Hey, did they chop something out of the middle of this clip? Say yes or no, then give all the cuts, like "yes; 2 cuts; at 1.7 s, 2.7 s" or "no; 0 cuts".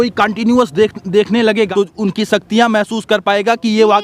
yes; 1 cut; at 1.7 s